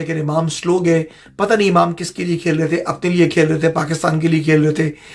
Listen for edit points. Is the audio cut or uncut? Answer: uncut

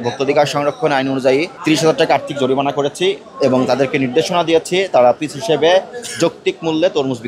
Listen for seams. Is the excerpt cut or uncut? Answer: cut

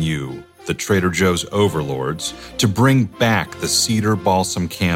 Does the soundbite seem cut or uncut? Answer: uncut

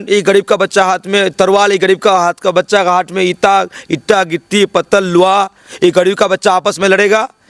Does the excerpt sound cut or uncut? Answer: uncut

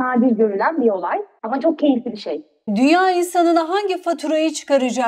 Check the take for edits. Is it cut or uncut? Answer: uncut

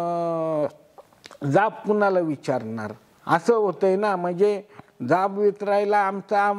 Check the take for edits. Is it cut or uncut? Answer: uncut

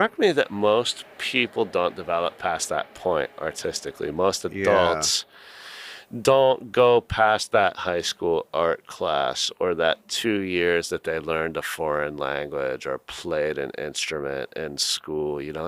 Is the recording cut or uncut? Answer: uncut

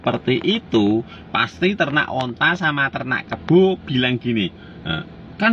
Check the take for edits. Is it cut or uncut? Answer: uncut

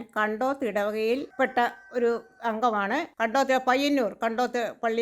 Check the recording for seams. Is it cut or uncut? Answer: cut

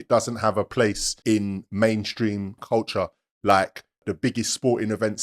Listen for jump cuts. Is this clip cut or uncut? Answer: cut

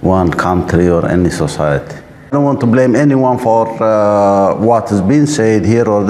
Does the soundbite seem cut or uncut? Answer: cut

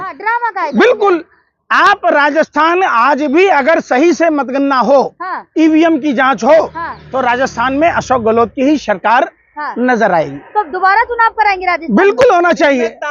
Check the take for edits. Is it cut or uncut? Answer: uncut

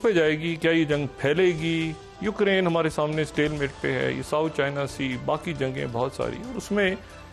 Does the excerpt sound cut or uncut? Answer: uncut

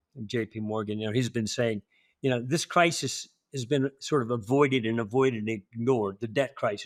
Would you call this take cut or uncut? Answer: uncut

